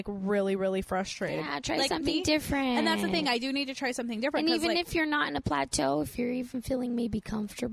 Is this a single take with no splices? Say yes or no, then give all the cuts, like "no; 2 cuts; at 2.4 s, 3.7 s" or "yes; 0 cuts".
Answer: yes; 0 cuts